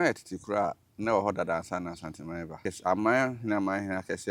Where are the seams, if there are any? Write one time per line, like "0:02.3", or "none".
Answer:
0:02.7